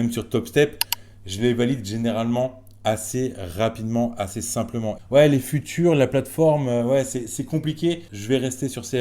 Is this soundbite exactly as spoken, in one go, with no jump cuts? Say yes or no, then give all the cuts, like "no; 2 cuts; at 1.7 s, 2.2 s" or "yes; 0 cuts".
no; 2 cuts; at 5.0 s, 8.1 s